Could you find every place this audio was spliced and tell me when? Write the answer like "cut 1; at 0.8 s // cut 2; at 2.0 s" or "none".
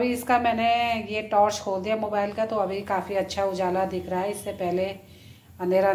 none